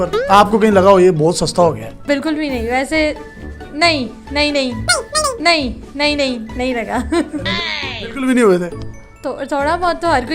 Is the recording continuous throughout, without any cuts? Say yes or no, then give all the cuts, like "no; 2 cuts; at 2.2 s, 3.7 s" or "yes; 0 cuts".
yes; 0 cuts